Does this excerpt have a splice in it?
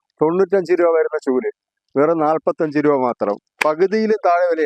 no; 0 cuts

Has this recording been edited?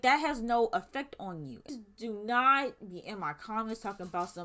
yes; 1 cut; at 1.8 s

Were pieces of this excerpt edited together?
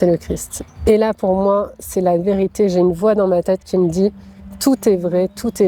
no; 0 cuts

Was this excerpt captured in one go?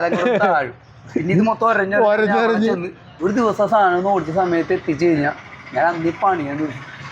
no; 1 cut; at 3.1 s

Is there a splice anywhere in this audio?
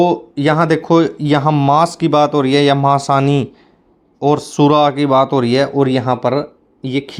no; 0 cuts

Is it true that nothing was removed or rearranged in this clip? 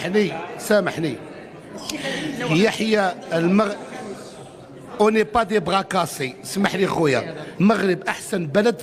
no; 1 cut; at 7.4 s

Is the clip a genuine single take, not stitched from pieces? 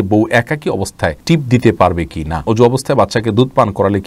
no; 2 cuts; at 1.2 s, 2.4 s

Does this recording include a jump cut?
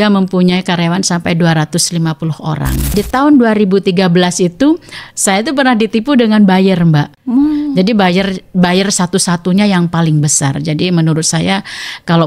yes; 2 cuts; at 2.9 s, 7.1 s

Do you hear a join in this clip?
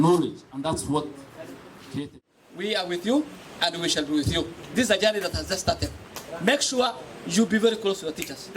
yes; 1 cut; at 2.1 s

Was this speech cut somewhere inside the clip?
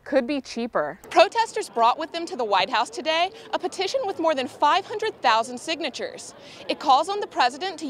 yes; 1 cut; at 1.0 s

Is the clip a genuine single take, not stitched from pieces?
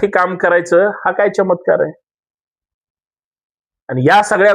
yes; 0 cuts

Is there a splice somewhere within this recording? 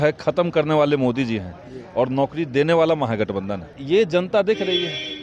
yes; 1 cut; at 3.8 s

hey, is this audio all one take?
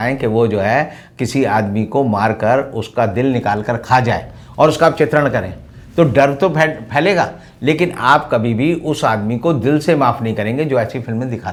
yes; 0 cuts

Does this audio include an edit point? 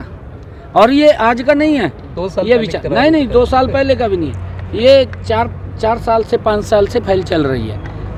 no; 0 cuts

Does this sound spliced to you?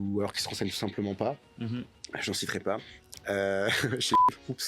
no; 0 cuts

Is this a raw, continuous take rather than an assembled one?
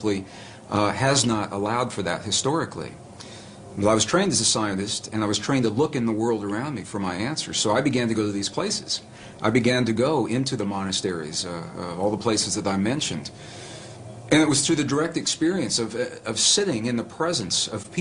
no; 1 cut; at 4.9 s

